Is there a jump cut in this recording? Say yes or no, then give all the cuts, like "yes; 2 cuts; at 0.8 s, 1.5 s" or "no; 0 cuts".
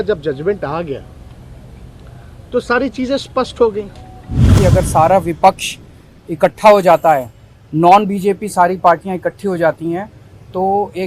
yes; 1 cut; at 4.5 s